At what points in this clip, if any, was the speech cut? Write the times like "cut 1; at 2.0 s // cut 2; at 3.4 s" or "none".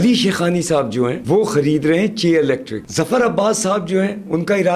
cut 1; at 1.2 s // cut 2; at 2.8 s